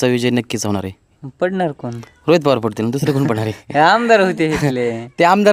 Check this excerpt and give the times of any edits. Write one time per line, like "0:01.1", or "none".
0:01.2